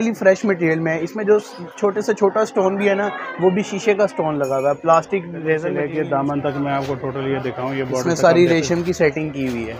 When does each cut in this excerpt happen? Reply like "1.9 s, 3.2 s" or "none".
5.8 s

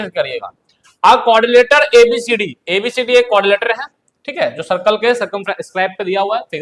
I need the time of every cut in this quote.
none

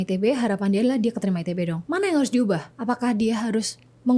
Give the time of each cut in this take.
1.8 s

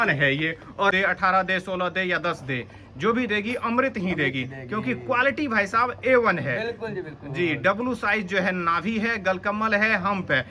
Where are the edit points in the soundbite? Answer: 0.9 s

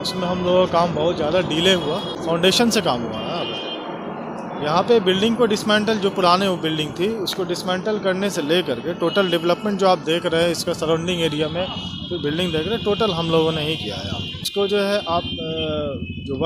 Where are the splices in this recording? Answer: 2.3 s, 14.4 s

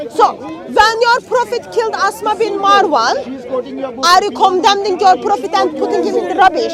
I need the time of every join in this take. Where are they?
none

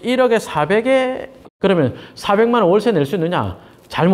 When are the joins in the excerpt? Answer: 1.5 s

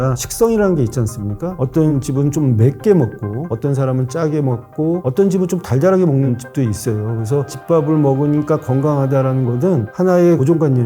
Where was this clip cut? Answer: 1.6 s, 7.5 s

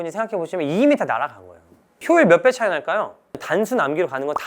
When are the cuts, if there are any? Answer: 1.9 s, 3.3 s

